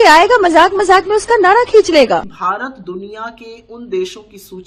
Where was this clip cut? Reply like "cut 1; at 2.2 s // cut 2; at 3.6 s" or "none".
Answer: cut 1; at 2.3 s